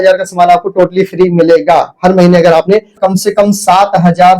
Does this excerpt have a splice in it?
yes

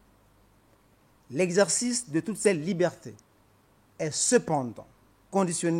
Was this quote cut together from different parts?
yes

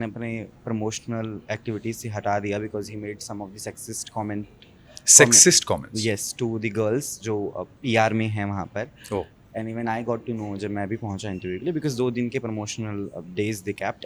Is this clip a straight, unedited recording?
yes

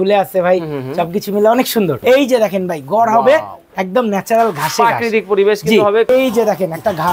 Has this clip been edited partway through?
yes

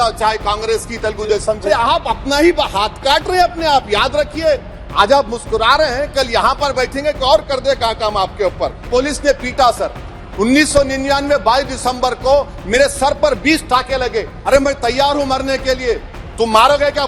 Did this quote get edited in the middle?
yes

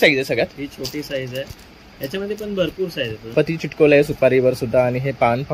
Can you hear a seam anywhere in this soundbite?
yes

